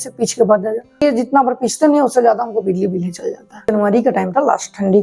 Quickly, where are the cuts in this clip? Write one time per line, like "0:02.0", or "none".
0:01.0
0:03.7